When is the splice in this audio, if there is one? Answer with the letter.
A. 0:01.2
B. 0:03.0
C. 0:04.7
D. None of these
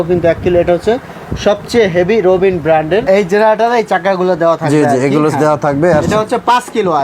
B